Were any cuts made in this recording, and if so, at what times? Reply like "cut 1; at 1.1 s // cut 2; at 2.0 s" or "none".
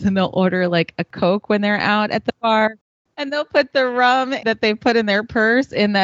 cut 1; at 1.1 s // cut 2; at 2.9 s // cut 3; at 4.4 s